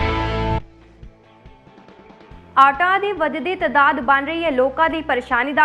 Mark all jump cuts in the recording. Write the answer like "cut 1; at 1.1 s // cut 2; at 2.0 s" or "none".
cut 1; at 2.3 s